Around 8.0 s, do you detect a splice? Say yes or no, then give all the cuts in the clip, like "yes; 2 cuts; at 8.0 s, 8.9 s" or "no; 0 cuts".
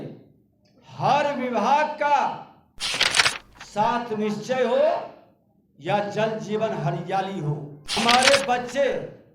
yes; 1 cut; at 8.0 s